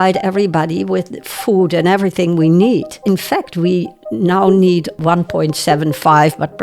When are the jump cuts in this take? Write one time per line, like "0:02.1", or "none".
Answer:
0:02.9
0:05.0